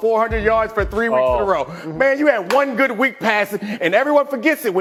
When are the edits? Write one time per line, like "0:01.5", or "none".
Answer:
none